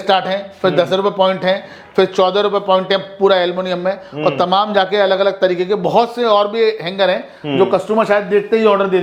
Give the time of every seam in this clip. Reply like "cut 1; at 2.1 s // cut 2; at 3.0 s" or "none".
none